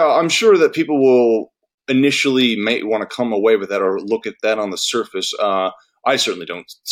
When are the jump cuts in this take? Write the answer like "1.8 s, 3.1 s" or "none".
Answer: none